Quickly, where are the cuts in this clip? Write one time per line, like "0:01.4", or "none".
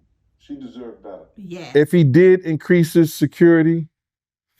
0:01.7